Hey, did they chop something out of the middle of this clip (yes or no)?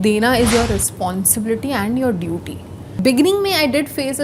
yes